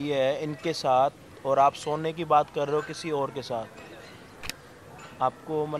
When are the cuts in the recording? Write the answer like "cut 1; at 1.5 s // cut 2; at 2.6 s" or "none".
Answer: none